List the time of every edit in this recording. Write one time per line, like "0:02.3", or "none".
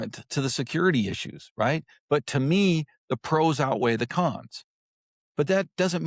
none